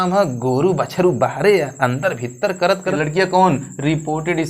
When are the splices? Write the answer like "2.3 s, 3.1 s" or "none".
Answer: 3.0 s